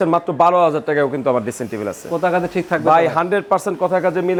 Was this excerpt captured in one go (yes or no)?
yes